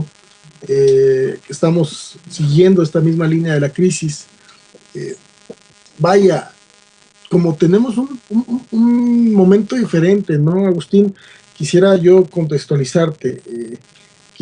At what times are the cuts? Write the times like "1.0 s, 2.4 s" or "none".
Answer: 13.3 s

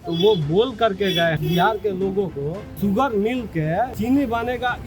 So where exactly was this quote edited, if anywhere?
1.4 s, 2.8 s, 3.9 s

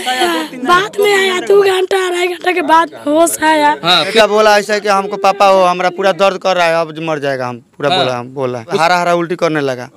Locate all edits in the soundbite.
4.1 s, 8.8 s

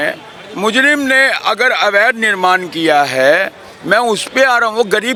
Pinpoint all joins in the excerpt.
none

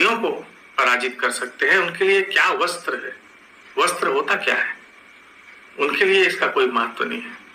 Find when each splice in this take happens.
none

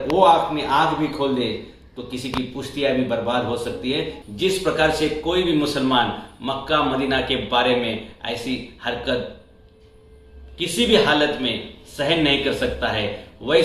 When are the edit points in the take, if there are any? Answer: 4.2 s

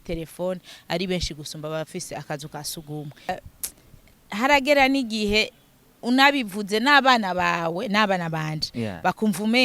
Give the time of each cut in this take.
3.3 s

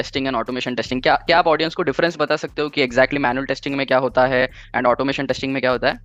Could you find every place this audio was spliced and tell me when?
none

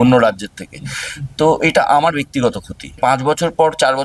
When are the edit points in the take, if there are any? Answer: 3.0 s

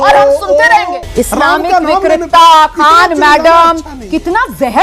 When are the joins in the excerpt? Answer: 1.0 s

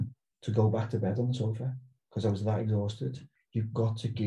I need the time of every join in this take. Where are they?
3.3 s

